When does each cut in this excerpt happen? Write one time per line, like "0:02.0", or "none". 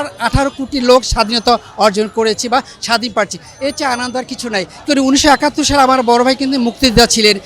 0:04.8